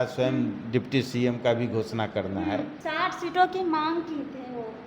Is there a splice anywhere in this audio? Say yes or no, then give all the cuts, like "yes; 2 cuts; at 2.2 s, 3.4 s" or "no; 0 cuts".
yes; 1 cut; at 2.8 s